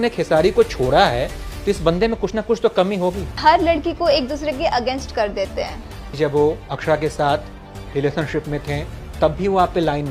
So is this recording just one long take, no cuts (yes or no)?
yes